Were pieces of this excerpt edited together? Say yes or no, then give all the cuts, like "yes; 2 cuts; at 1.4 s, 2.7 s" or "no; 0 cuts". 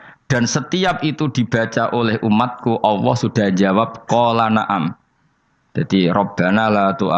no; 0 cuts